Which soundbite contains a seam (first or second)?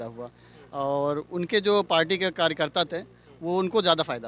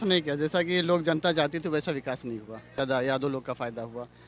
second